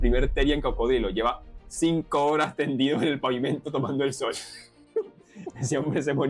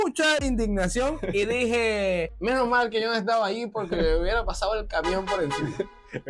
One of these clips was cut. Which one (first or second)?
second